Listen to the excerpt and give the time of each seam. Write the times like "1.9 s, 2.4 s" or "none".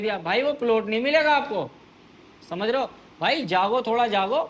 none